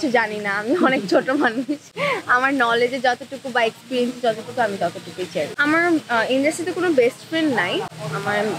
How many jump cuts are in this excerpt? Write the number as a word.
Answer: zero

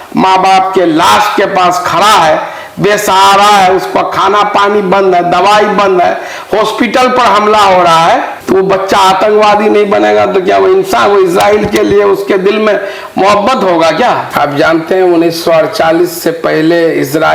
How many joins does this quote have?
one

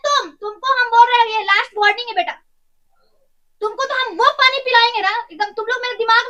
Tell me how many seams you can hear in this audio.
zero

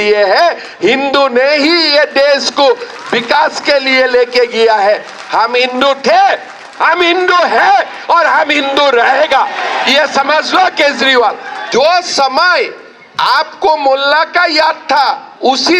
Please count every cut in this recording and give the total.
one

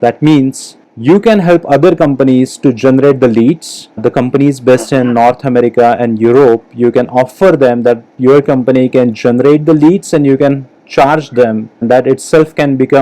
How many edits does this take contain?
one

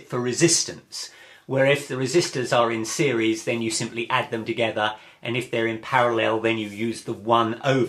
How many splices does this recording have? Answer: one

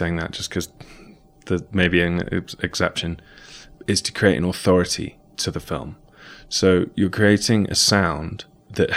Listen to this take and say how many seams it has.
one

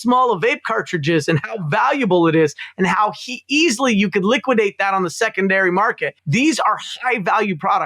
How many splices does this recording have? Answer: one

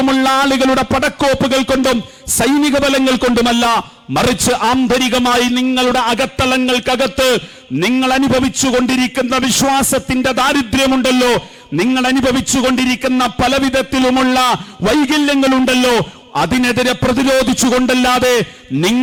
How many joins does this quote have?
zero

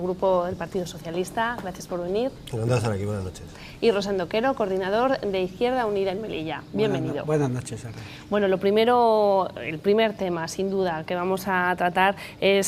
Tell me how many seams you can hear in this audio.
zero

